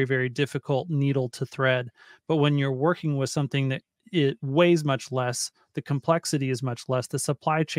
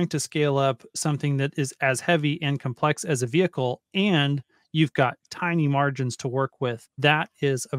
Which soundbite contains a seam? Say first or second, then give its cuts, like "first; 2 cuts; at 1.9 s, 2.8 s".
second; 1 cut; at 6.9 s